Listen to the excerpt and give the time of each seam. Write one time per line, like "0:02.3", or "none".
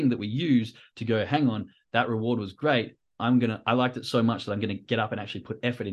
none